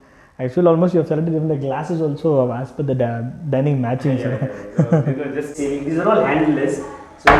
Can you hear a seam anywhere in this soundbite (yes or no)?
yes